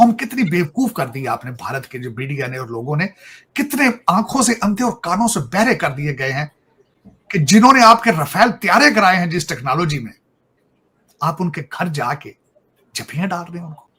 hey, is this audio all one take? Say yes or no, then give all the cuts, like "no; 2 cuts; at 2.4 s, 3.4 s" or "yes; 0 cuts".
yes; 0 cuts